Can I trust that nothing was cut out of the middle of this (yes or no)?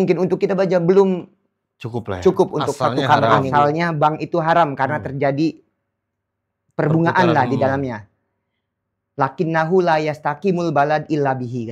no